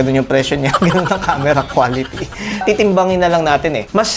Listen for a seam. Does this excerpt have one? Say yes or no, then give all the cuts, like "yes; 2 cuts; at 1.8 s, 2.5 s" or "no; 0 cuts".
yes; 1 cut; at 2.6 s